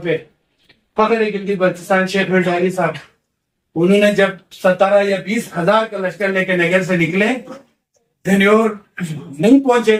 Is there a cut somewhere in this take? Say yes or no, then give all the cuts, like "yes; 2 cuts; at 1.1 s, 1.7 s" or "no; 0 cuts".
no; 0 cuts